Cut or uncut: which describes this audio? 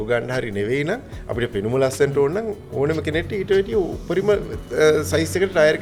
uncut